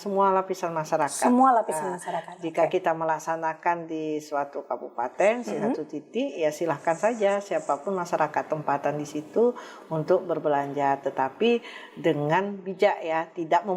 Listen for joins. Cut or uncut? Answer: uncut